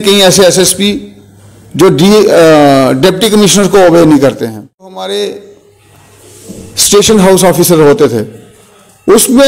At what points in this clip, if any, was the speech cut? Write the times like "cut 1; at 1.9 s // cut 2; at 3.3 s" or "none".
cut 1; at 5.0 s